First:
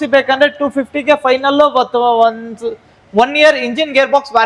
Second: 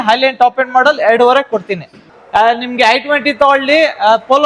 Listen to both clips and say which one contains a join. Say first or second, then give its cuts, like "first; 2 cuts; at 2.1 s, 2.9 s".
second; 1 cut; at 2.0 s